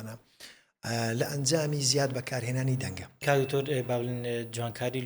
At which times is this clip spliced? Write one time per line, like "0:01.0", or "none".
0:03.1